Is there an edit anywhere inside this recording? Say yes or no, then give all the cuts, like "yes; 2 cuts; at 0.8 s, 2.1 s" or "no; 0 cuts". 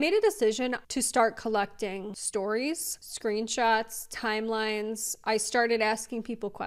yes; 2 cuts; at 0.8 s, 2.1 s